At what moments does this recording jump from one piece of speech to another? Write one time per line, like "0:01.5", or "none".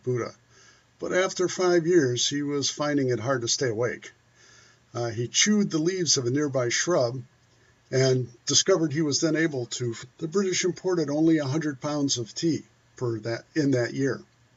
none